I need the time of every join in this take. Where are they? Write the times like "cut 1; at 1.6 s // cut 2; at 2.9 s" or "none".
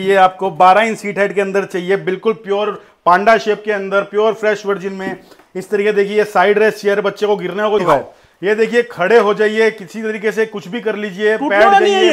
cut 1; at 7.8 s